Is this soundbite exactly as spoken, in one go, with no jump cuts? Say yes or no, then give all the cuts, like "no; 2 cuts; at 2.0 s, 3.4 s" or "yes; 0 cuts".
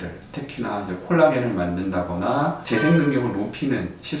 no; 1 cut; at 2.6 s